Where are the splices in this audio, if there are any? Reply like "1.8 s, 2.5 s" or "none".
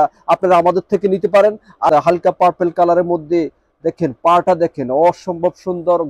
1.9 s